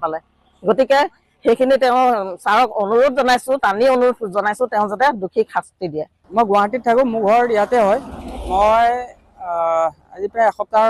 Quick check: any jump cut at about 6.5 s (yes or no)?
no